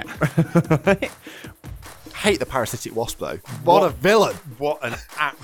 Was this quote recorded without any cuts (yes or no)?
no